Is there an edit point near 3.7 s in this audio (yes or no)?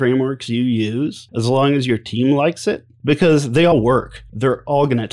yes